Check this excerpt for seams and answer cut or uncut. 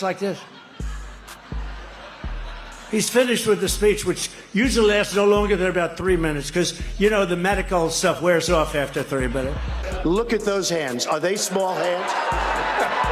cut